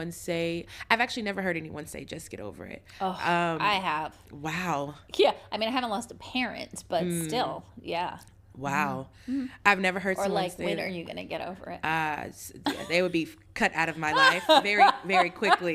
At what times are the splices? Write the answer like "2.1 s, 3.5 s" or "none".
none